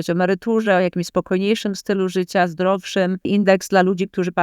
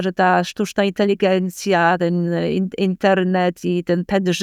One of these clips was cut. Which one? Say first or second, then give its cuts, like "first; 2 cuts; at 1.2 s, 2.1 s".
first; 1 cut; at 3.3 s